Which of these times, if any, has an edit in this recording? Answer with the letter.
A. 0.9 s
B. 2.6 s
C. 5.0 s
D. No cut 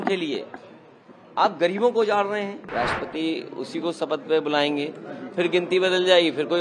B